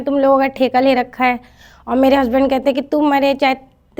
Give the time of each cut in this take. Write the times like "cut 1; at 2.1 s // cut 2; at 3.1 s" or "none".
none

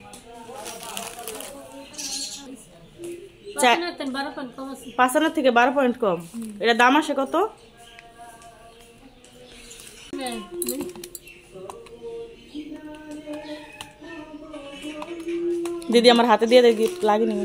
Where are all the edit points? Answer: cut 1; at 10.1 s

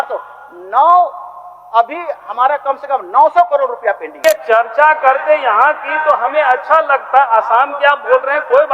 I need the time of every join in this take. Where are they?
cut 1; at 4.2 s

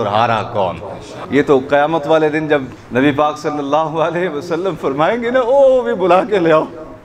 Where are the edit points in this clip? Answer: cut 1; at 1.1 s // cut 2; at 2.8 s

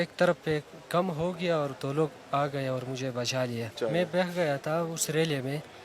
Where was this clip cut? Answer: cut 1; at 3.8 s

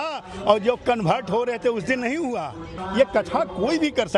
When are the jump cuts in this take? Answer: cut 1; at 2.8 s

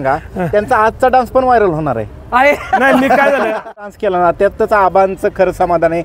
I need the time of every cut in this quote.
cut 1; at 3.9 s

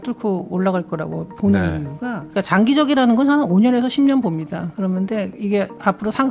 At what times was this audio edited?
none

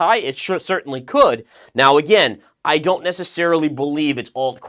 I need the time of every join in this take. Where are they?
cut 1; at 1.6 s

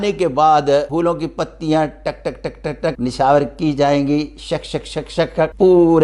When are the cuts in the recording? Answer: none

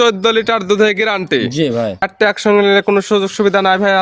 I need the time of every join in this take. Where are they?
cut 1; at 2.0 s

